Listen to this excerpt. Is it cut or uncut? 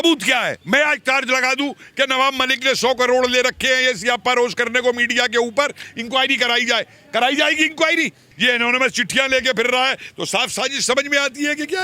cut